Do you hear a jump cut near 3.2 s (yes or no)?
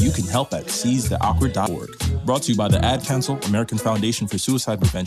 no